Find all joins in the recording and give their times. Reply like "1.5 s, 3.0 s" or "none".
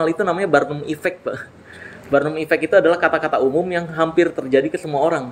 none